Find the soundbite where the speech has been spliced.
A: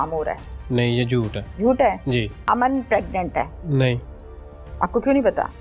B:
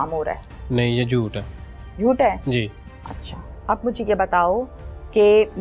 A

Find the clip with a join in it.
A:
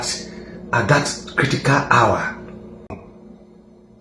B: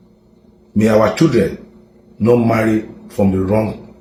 A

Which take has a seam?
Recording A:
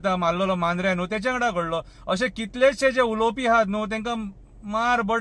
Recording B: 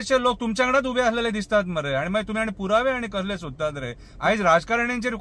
B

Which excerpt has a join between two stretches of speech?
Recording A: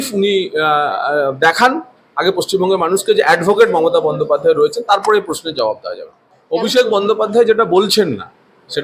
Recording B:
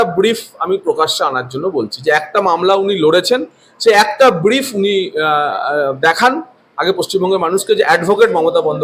A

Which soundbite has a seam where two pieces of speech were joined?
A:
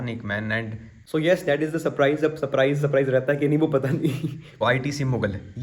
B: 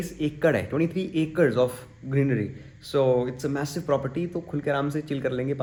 A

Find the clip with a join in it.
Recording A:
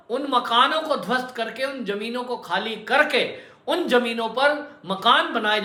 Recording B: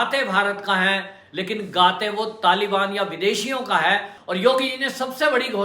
B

